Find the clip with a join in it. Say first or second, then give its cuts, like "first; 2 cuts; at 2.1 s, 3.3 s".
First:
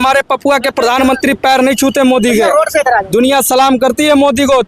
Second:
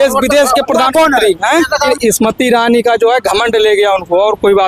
second; 1 cut; at 1.9 s